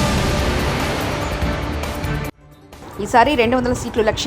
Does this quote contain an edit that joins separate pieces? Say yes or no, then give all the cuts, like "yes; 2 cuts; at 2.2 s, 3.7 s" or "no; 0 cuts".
no; 0 cuts